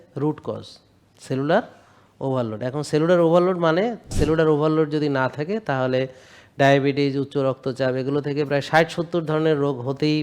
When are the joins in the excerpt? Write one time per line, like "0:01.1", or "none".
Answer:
0:04.1